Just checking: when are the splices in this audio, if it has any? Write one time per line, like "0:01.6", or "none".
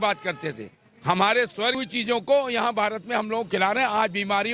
0:01.8

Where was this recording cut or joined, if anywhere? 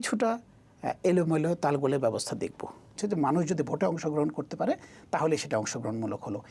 0:03.0

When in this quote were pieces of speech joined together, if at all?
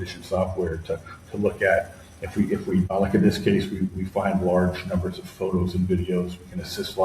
0:02.9

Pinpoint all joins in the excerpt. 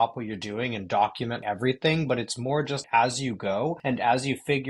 0:01.4
0:02.8
0:03.8

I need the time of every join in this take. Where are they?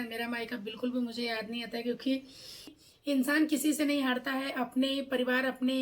0:02.7

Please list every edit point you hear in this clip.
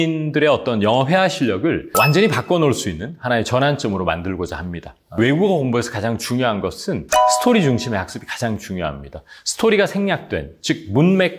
0:01.9
0:05.2

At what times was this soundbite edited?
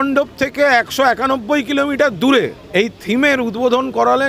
0:02.6

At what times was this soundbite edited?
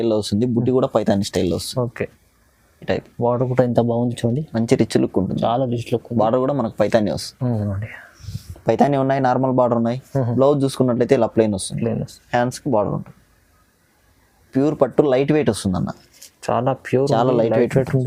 none

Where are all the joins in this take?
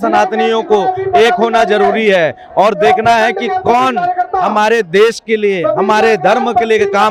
none

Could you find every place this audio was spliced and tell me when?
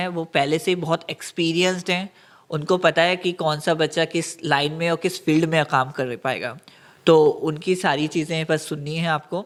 none

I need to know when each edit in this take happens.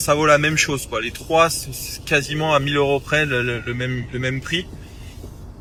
none

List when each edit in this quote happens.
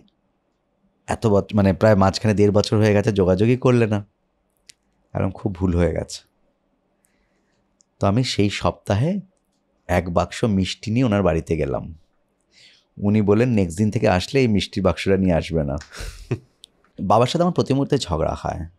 0:17.0

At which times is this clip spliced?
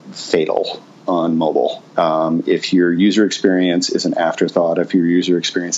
none

